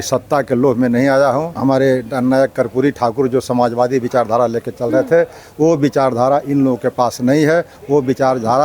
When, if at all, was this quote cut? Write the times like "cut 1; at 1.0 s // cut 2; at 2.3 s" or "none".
cut 1; at 1.5 s